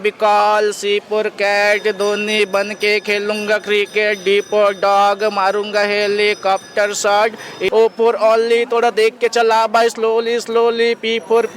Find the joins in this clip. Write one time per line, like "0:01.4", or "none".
none